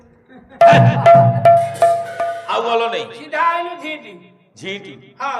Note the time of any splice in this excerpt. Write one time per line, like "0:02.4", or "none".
0:02.5